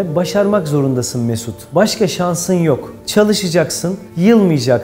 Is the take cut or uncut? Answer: cut